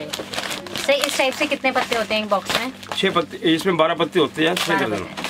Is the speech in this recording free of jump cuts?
yes; 0 cuts

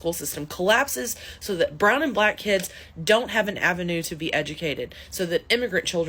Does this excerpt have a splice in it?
no; 0 cuts

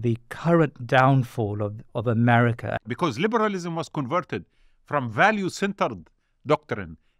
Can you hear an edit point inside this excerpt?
yes; 1 cut; at 2.7 s

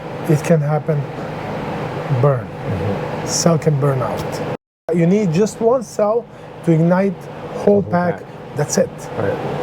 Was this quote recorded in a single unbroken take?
no; 1 cut; at 4.9 s

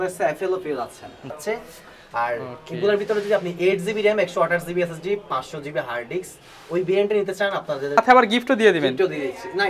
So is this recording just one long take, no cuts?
no; 2 cuts; at 1.3 s, 8.0 s

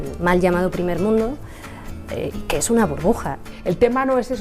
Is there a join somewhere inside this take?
yes; 1 cut; at 3.5 s

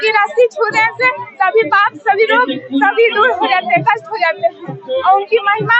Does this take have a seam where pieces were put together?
no; 0 cuts

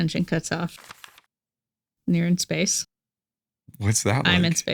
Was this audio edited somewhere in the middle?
no; 0 cuts

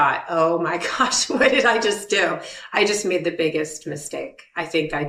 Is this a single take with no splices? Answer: yes; 0 cuts

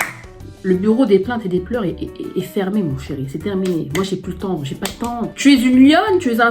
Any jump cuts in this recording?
yes; 1 cut; at 5.2 s

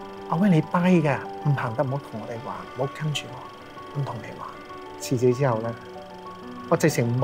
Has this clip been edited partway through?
yes; 1 cut; at 4.9 s

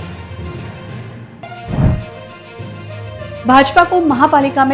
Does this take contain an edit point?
yes; 1 cut; at 1.3 s

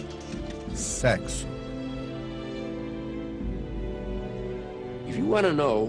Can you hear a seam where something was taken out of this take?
no; 0 cuts

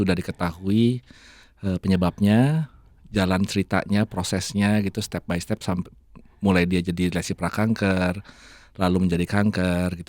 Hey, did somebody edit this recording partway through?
no; 0 cuts

